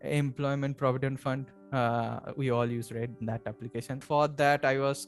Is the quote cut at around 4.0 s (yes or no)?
yes